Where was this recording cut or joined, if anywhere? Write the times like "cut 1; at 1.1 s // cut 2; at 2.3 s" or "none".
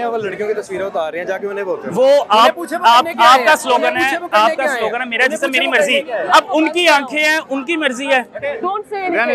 none